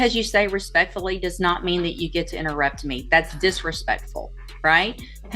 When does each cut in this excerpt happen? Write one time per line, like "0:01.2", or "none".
none